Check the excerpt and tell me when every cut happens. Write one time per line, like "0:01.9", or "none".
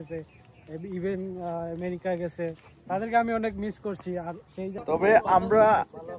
0:04.7